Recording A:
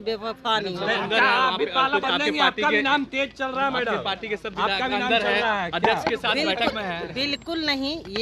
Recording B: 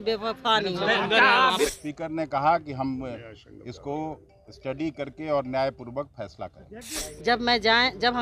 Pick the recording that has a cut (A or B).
B